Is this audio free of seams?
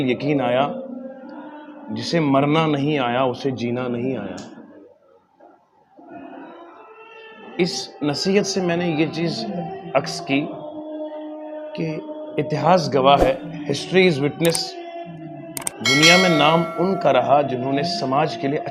yes; 0 cuts

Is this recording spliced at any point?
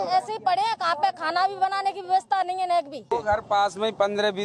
yes; 1 cut; at 3.0 s

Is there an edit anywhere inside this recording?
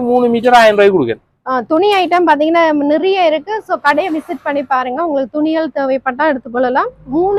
no; 0 cuts

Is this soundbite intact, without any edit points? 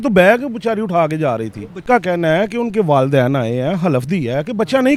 yes; 0 cuts

